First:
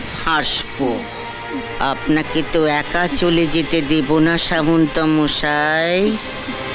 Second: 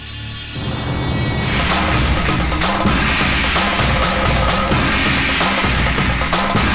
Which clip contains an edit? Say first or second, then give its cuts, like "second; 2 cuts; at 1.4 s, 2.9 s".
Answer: second; 1 cut; at 1.5 s